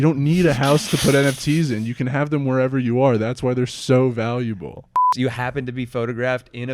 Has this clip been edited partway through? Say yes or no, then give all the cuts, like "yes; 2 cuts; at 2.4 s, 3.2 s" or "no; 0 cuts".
yes; 1 cut; at 5.1 s